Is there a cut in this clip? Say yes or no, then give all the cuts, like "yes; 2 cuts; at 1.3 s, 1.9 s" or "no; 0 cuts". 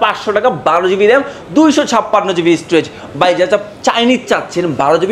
no; 0 cuts